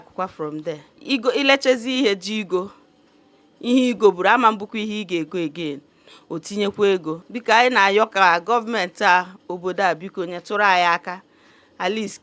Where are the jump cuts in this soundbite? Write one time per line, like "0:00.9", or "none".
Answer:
0:00.9
0:04.0
0:07.3